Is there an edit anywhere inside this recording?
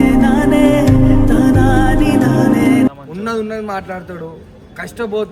no; 0 cuts

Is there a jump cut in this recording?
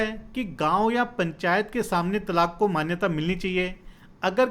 no; 0 cuts

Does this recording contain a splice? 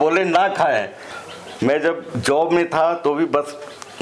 yes; 1 cut; at 1.0 s

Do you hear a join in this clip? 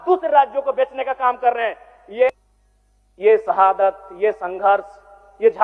yes; 1 cut; at 2.3 s

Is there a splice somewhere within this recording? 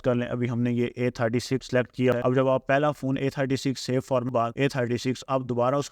yes; 2 cuts; at 2.1 s, 4.3 s

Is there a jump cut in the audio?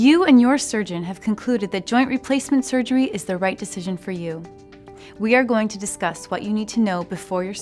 no; 0 cuts

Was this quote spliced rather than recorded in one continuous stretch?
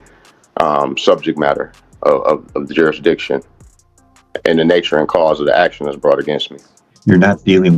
yes; 1 cut; at 6.7 s

